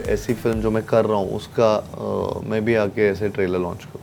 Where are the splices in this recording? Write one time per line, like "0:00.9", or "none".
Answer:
none